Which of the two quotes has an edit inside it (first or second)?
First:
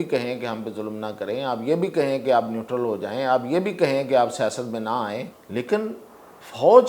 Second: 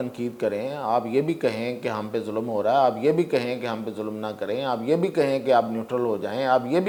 first